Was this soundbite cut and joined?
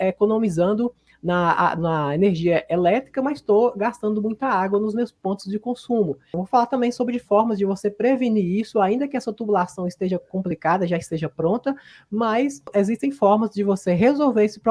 yes; 2 cuts; at 6.3 s, 12.6 s

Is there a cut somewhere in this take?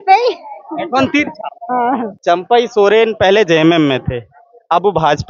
yes; 1 cut; at 2.1 s

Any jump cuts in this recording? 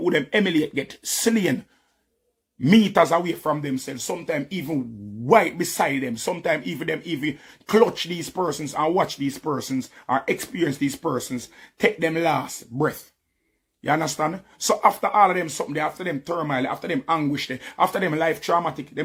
no; 0 cuts

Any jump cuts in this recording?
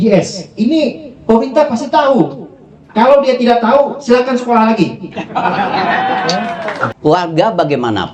yes; 1 cut; at 6.9 s

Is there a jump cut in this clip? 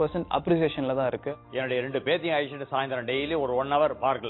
yes; 1 cut; at 1.3 s

